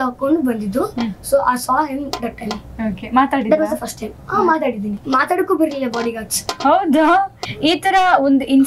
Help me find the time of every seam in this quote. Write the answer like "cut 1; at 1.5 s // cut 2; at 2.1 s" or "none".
cut 1; at 5.0 s // cut 2; at 7.4 s